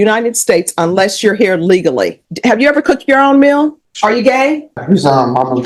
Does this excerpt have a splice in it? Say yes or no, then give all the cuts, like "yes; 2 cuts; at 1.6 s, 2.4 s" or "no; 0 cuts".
yes; 3 cuts; at 2.2 s, 3.8 s, 4.8 s